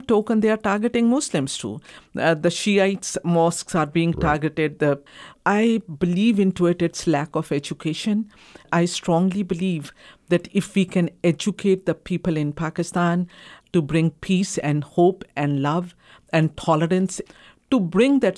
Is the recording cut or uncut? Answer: cut